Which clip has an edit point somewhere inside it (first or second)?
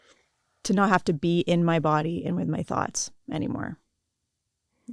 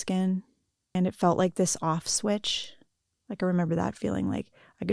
second